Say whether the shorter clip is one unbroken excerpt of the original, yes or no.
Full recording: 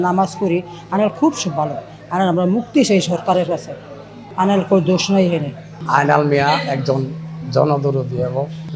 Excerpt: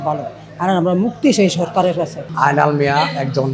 no